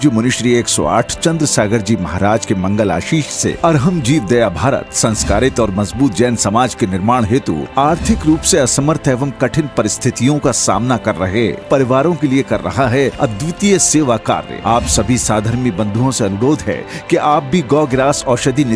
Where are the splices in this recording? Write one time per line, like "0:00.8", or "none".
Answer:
none